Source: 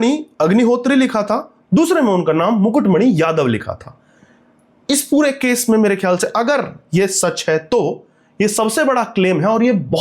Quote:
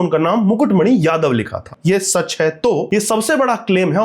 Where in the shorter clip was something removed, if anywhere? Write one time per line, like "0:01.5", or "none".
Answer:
0:01.7
0:02.9